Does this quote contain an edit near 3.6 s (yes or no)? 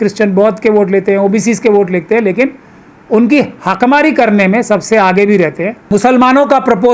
no